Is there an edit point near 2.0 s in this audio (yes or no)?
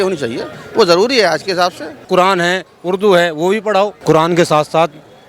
yes